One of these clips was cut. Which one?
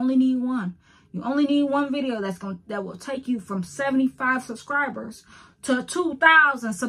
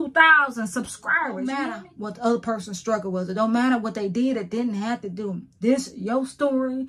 second; 1 cut; at 1.9 s

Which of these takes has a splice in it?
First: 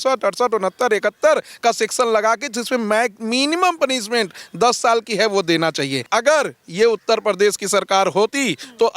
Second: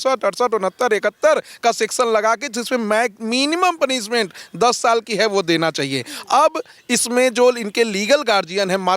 first; 1 cut; at 6.1 s

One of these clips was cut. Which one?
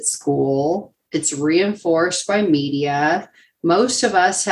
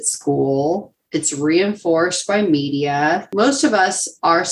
second; 1 cut; at 3.3 s

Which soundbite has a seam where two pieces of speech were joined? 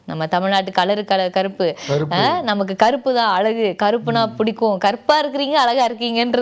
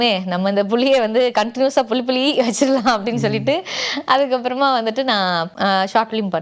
second; 1 cut; at 5.5 s

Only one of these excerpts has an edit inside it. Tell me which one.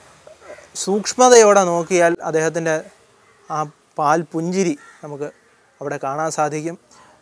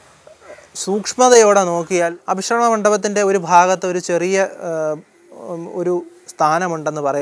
second; 1 cut; at 2.2 s

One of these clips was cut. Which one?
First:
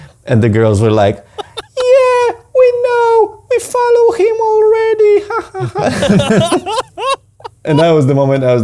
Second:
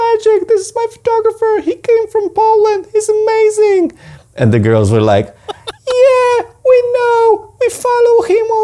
first; 1 cut; at 7.7 s

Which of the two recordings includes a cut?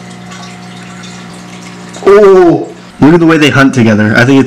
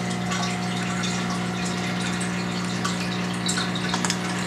first; 2 cuts; at 1.3 s, 2.8 s

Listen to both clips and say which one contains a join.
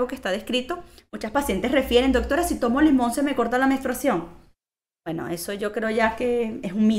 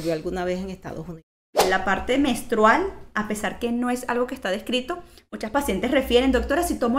second; 1 cut; at 1.6 s

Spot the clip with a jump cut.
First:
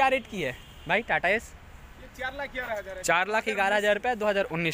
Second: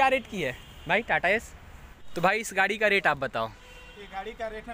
second; 1 cut; at 2.1 s

